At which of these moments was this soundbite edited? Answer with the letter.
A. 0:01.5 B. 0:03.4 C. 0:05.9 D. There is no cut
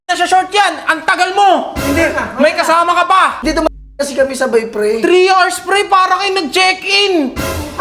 B